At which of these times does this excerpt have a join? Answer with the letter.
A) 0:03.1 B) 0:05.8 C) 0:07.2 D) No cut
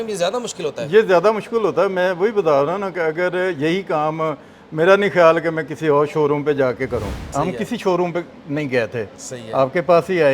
C